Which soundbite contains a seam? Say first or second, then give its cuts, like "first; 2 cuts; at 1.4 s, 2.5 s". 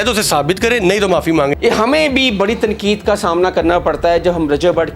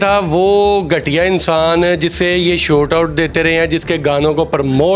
first; 1 cut; at 1.5 s